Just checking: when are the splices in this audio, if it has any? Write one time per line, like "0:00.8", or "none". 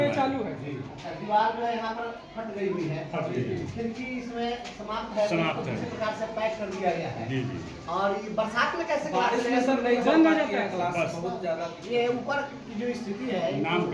none